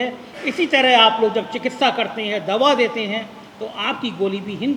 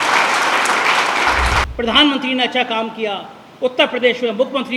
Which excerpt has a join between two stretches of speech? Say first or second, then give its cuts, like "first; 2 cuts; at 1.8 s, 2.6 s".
second; 1 cut; at 1.7 s